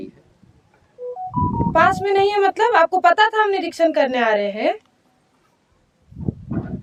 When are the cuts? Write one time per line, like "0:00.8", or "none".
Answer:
none